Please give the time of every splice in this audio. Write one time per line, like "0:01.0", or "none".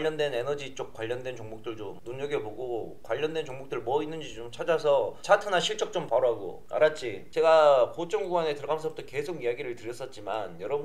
0:07.2